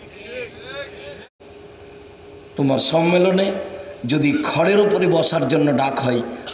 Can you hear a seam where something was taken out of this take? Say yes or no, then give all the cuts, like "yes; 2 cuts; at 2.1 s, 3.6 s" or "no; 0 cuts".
yes; 1 cut; at 1.2 s